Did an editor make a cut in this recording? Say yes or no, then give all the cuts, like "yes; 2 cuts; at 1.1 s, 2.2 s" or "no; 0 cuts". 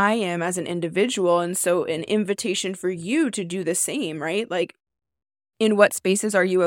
no; 0 cuts